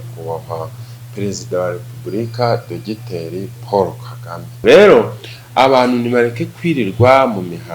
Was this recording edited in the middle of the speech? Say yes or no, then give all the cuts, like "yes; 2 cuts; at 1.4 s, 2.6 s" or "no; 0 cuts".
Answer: yes; 1 cut; at 4.6 s